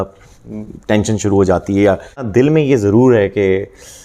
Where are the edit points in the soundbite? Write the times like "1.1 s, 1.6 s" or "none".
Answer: 2.2 s